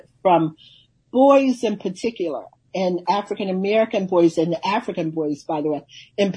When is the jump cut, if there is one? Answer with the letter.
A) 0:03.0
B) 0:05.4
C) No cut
A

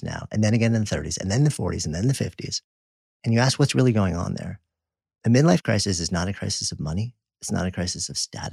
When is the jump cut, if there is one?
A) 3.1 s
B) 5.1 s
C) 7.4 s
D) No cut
A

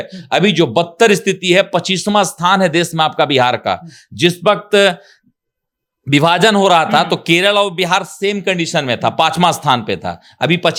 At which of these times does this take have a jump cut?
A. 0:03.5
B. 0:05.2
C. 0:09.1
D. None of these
D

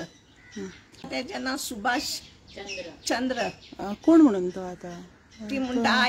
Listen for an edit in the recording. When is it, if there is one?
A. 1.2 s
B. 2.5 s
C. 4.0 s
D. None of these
A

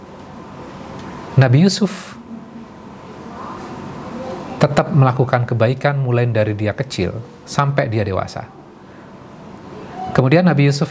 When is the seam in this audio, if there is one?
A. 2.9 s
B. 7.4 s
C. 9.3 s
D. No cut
D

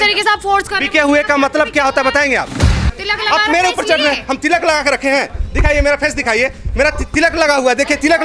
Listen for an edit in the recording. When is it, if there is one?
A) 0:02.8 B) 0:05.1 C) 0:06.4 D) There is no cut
A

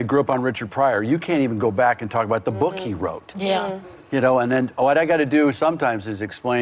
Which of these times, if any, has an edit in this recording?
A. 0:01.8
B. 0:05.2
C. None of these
C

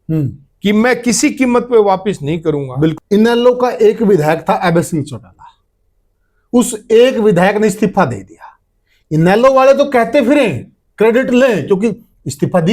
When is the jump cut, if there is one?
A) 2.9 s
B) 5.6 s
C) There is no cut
A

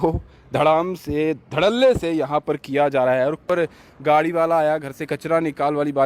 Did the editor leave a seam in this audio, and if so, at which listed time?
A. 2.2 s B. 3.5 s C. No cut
B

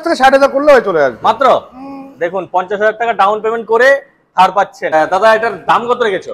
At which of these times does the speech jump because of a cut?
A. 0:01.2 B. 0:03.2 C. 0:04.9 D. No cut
C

